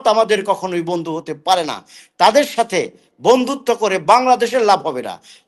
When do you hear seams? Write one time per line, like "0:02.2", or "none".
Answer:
none